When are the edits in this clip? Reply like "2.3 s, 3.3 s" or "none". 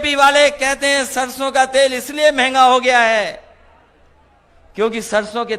none